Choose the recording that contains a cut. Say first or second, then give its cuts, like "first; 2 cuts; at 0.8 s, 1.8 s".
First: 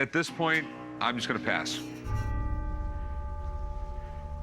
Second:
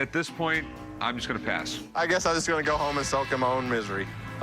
second; 1 cut; at 1.9 s